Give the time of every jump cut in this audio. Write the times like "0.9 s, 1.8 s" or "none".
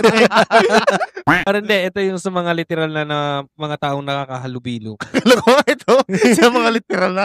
1.2 s